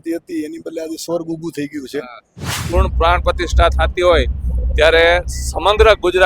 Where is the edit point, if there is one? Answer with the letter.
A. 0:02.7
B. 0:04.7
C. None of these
A